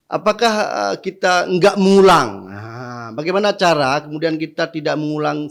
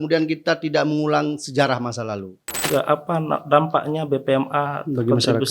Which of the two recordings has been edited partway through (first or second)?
second